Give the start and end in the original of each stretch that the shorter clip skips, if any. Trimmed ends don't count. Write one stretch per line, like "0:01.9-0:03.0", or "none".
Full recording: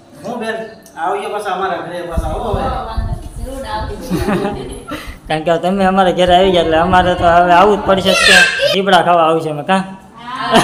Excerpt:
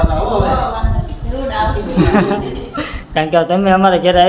none

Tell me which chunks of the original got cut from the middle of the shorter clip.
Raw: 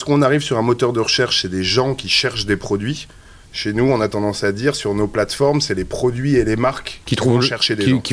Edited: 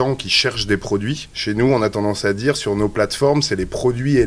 0:03.1-0:03.5

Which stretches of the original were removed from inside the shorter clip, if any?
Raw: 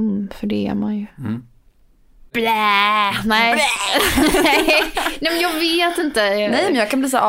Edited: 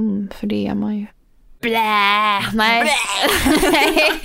0:01.1-0:01.9

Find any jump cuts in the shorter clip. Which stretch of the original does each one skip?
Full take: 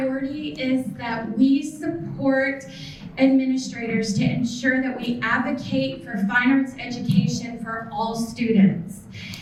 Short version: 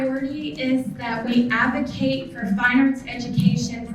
0:01.3-0:05.0

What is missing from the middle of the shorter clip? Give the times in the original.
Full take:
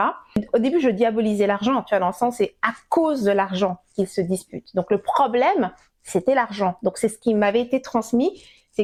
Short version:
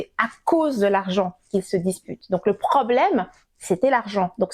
none

